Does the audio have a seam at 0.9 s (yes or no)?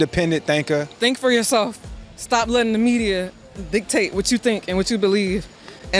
yes